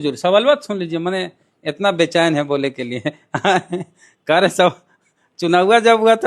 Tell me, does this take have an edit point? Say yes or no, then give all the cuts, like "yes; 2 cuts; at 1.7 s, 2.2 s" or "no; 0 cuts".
no; 0 cuts